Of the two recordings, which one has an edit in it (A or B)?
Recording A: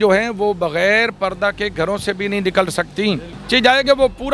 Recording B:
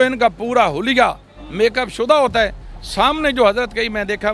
A